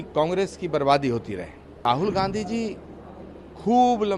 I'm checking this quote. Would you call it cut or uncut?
cut